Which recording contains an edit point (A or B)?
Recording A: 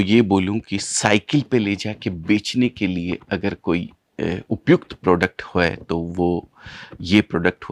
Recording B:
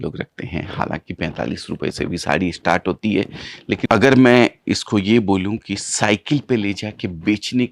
B